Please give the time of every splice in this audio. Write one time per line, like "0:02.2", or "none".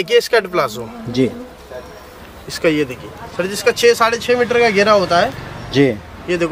none